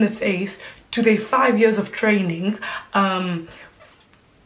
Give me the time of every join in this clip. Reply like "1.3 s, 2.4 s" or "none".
none